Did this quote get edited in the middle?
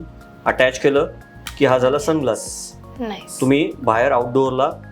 no; 0 cuts

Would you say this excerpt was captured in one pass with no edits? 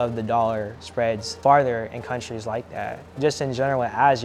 no; 1 cut; at 1.3 s

